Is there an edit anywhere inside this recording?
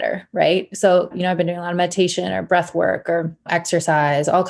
yes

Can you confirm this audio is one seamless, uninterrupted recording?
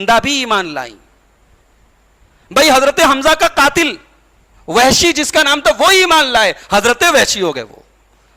yes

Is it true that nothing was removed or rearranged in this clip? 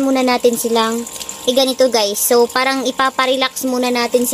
yes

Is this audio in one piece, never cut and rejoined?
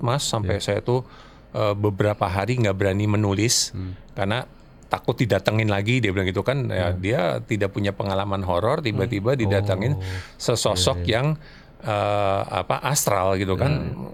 yes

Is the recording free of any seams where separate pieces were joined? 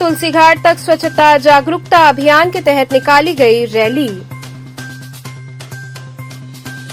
yes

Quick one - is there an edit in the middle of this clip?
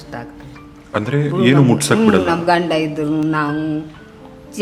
no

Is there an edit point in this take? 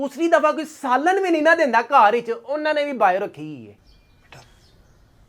no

